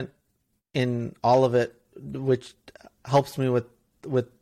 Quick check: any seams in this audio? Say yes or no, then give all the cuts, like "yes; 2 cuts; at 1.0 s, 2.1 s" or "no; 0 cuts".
no; 0 cuts